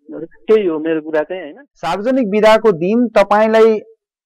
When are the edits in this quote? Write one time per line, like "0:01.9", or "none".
0:01.6

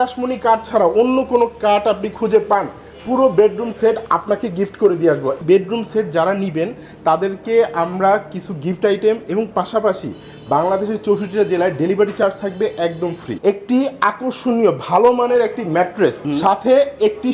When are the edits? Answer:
0:05.4
0:13.4
0:16.3

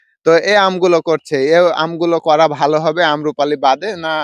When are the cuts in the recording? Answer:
none

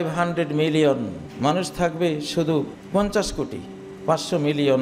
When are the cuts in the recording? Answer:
0:01.2
0:02.8

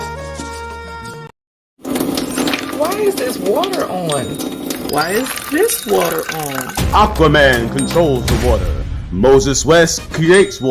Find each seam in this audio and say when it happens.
0:01.5

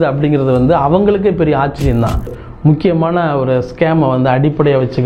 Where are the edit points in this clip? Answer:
0:02.4

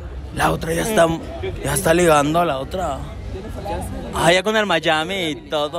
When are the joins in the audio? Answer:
none

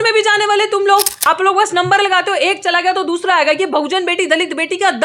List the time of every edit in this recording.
0:01.1

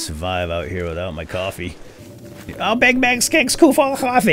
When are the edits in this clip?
0:02.4

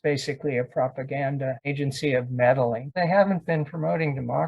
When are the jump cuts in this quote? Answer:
0:02.9

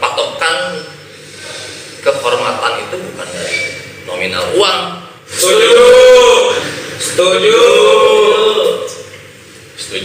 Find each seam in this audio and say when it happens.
0:05.2
0:06.6

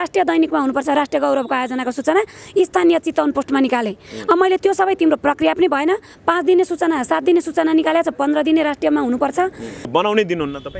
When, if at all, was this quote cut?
0:09.9

